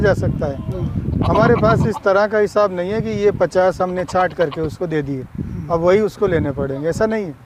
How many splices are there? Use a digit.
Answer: 0